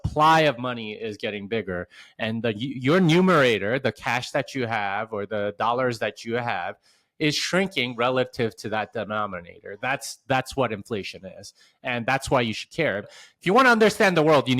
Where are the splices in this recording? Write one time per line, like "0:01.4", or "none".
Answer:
0:13.1